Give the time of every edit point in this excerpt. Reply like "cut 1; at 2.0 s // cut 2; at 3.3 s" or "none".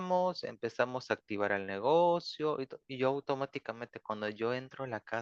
none

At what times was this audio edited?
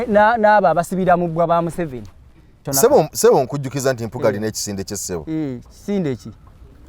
cut 1; at 2.6 s

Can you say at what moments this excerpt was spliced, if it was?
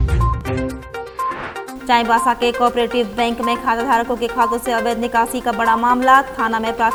none

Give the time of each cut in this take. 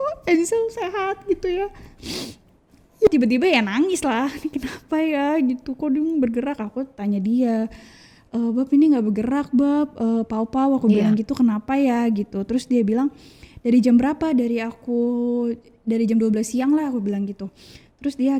cut 1; at 3.1 s

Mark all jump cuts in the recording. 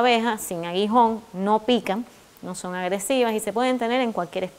none

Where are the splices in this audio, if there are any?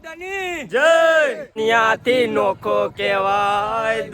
cut 1; at 1.4 s

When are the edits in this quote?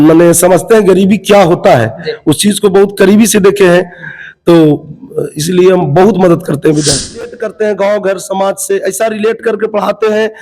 cut 1; at 7.3 s

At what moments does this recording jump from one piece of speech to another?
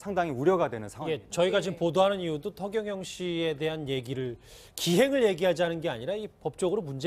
cut 1; at 2.6 s

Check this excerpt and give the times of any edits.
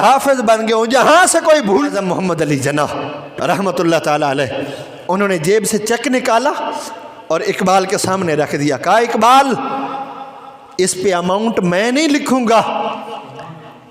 cut 1; at 1.9 s

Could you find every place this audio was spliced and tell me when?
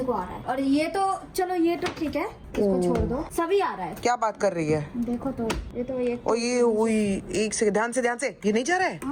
none

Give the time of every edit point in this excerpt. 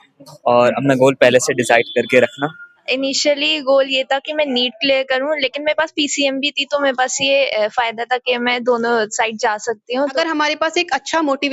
cut 1; at 2.9 s // cut 2; at 10.1 s

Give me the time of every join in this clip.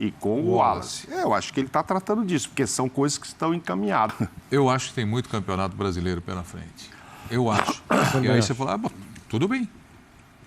cut 1; at 4.1 s

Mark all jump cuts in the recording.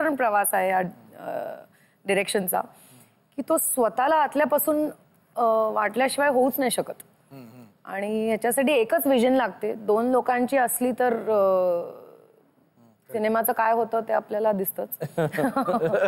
none

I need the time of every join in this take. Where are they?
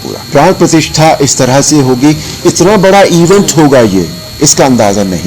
cut 1; at 4.2 s

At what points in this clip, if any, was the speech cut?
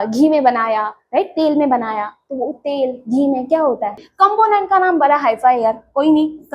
cut 1; at 4.0 s

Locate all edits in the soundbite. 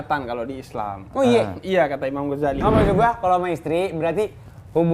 cut 1; at 2.6 s

